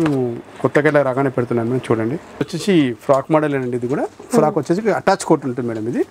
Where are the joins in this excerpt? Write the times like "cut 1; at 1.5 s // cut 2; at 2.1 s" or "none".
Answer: cut 1; at 2.5 s